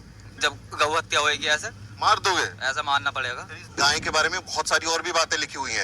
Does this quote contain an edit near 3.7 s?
yes; 1 cut; at 3.7 s

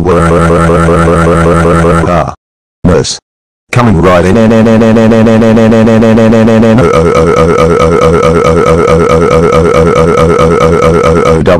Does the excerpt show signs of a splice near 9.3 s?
yes; 1 cut; at 9.3 s

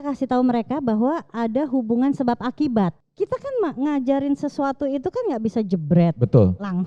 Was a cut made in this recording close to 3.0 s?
yes; 1 cut; at 3.0 s

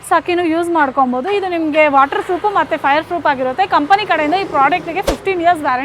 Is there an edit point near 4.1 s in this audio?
no; 0 cuts

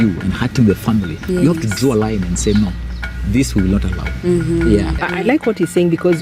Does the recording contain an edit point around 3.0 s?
no; 1 cut; at 5.0 s

